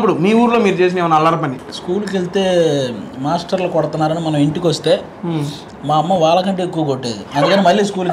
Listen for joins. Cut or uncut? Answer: cut